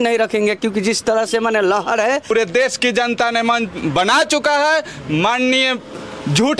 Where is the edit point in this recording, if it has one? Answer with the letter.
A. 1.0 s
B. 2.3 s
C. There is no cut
B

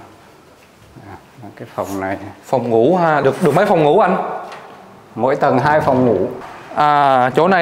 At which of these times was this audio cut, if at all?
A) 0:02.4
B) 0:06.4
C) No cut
B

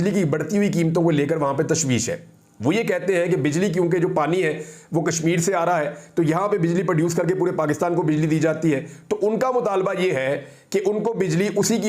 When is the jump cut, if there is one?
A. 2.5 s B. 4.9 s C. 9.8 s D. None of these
D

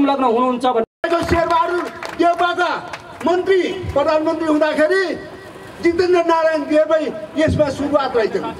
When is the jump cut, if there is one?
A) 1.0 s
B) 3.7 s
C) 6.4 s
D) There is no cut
A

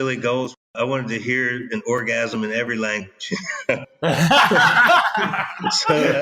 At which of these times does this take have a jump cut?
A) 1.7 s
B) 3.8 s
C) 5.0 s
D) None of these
B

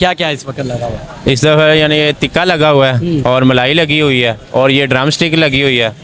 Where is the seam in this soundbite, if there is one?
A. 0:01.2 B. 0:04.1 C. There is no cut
C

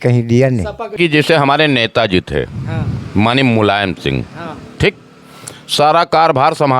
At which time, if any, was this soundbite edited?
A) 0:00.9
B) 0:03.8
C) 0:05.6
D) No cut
A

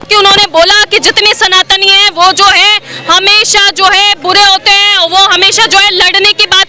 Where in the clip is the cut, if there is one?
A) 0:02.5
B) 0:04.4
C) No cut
C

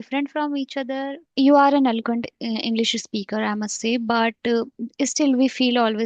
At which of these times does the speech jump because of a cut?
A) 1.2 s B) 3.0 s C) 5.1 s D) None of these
A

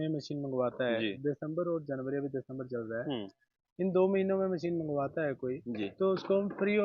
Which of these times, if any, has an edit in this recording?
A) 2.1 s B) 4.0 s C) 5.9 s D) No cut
D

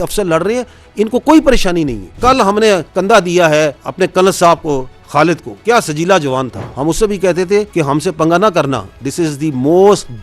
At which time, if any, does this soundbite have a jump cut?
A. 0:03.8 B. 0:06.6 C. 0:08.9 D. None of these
B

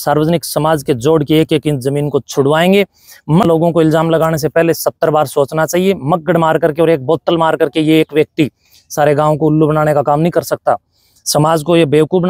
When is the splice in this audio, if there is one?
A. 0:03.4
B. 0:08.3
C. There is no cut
A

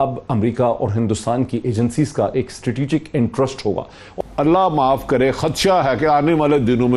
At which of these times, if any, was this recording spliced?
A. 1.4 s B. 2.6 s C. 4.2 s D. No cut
C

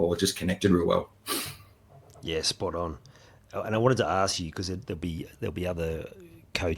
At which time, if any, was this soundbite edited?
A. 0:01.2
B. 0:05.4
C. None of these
C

